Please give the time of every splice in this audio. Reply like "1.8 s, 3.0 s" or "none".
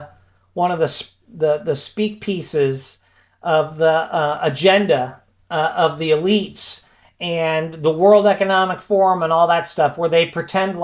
none